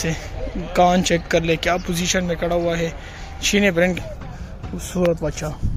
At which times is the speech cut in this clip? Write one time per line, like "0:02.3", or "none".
0:04.0